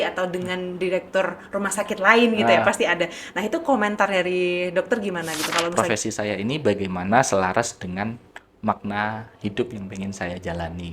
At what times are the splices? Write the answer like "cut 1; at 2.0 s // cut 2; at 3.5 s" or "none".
cut 1; at 5.7 s